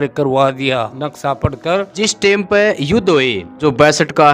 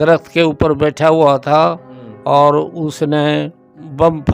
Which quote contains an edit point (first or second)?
first